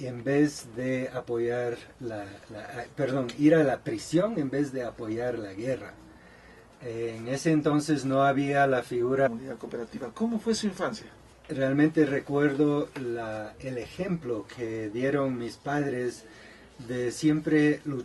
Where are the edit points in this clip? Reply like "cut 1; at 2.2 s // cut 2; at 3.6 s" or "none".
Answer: none